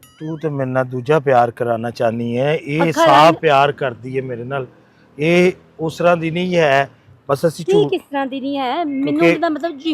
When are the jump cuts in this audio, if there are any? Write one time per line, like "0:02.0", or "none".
none